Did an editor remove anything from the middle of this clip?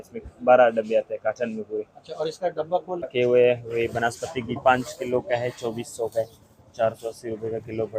yes; 1 cut; at 3.1 s

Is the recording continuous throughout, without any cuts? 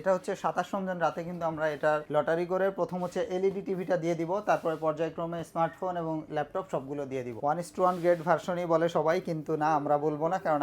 no; 2 cuts; at 2.1 s, 7.4 s

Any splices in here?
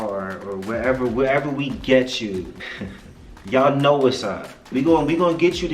yes; 2 cuts; at 2.5 s, 4.7 s

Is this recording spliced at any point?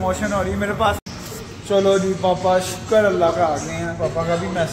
yes; 1 cut; at 1.0 s

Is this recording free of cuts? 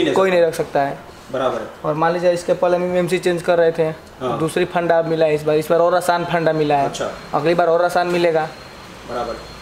yes; 0 cuts

